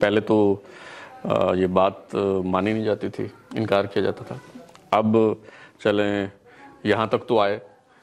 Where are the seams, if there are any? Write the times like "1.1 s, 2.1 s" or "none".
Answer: none